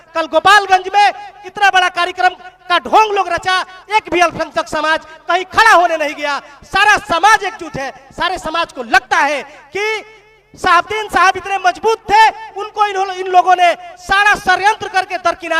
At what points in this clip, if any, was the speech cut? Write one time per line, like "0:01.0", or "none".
none